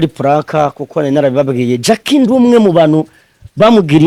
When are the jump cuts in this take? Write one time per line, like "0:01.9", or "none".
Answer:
none